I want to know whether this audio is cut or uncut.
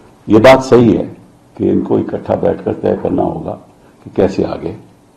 uncut